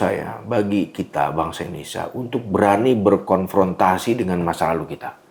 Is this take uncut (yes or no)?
yes